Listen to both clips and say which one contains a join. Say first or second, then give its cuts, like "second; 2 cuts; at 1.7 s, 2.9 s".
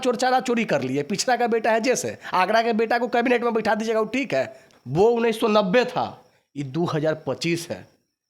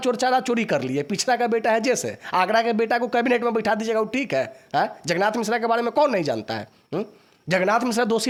first; 1 cut; at 4.6 s